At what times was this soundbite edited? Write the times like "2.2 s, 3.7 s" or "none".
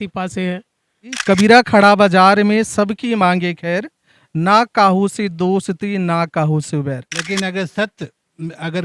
1.1 s, 7.1 s

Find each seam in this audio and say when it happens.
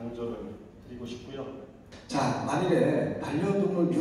1.9 s

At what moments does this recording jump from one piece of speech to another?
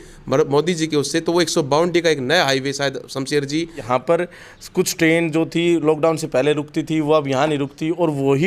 3.9 s

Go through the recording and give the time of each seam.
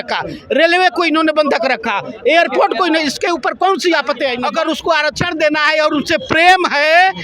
4.4 s

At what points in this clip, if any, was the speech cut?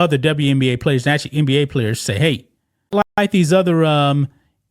3.2 s

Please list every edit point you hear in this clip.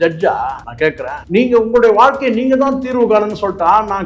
1.1 s

